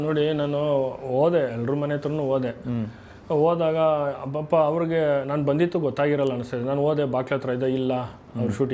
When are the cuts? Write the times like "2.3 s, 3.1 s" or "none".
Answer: none